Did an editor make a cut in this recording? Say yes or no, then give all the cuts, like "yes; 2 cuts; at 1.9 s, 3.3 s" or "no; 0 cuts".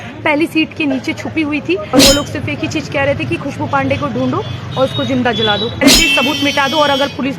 yes; 2 cuts; at 1.9 s, 5.9 s